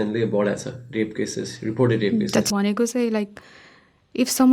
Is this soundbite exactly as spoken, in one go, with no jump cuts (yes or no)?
no